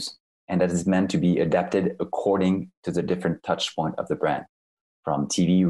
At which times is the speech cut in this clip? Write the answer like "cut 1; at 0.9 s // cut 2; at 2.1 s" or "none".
none